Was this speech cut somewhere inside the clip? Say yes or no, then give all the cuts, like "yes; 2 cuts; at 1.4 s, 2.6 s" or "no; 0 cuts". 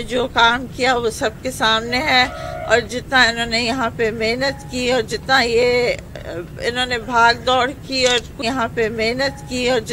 yes; 1 cut; at 8.4 s